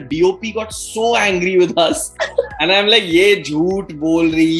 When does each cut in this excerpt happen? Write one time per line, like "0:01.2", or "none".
0:02.1